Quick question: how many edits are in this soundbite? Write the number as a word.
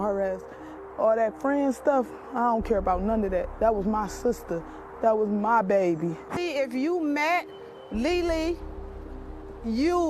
one